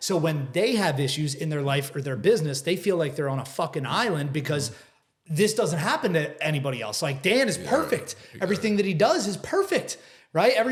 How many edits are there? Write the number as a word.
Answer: zero